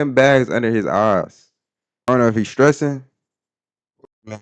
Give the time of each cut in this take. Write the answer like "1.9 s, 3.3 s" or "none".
2.1 s